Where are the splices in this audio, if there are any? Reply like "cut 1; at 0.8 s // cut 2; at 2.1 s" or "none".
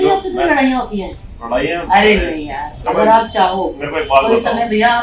cut 1; at 2.8 s